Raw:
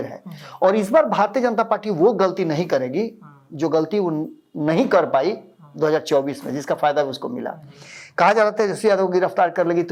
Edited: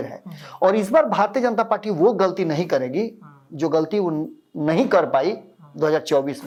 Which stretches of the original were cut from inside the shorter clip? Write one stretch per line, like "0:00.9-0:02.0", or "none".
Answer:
none